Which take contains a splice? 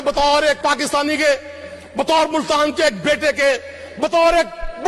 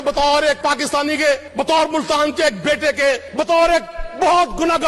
second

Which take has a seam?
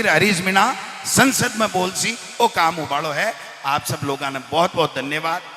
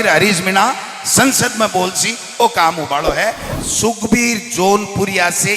second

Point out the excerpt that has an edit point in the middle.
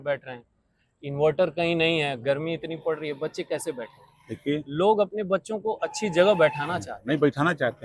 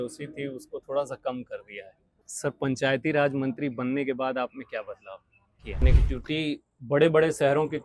second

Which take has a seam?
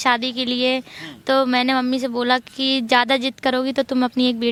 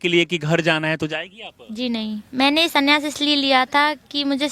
second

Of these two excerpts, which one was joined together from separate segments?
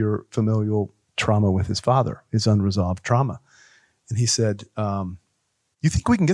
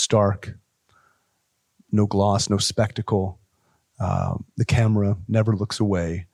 first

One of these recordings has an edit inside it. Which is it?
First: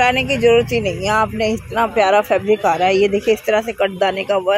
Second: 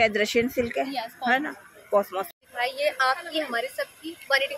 second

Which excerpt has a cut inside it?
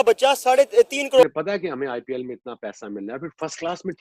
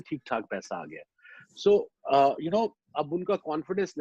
first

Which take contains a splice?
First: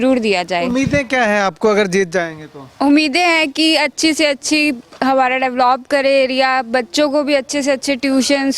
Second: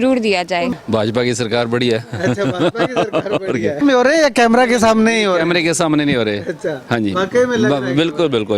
second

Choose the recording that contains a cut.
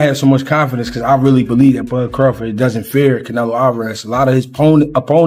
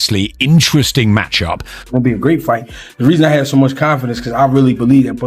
second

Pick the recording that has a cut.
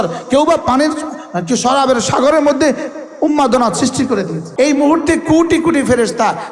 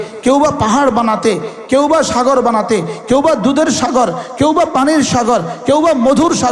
first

